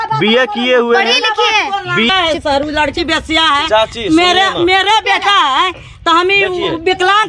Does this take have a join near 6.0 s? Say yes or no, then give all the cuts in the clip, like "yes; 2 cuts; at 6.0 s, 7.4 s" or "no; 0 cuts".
no; 1 cut; at 2.1 s